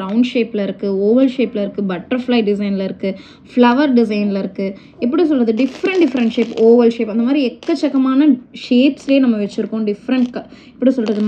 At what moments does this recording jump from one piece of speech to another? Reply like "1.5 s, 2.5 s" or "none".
none